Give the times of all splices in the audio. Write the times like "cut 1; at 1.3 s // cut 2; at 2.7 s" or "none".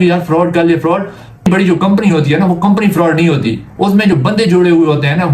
none